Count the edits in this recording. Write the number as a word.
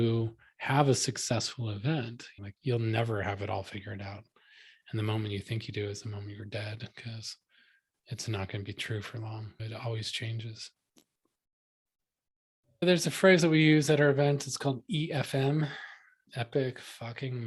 two